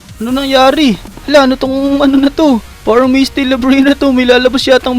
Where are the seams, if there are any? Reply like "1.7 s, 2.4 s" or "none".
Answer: 1.1 s, 2.7 s